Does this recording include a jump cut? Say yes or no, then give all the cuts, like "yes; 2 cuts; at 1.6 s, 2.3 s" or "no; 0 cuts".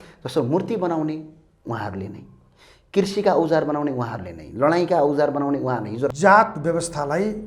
yes; 1 cut; at 6.1 s